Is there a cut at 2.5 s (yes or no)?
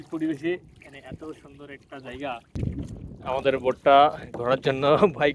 yes